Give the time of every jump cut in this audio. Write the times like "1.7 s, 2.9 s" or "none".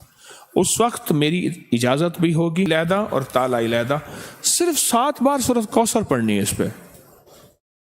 2.7 s